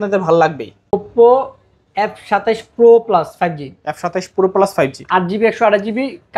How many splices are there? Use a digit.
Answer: 1